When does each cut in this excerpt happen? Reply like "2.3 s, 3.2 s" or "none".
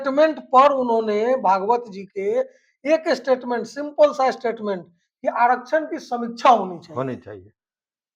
none